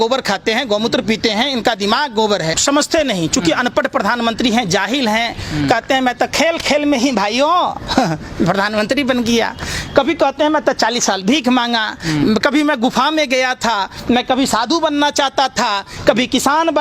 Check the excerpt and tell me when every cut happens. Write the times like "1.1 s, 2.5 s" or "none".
2.6 s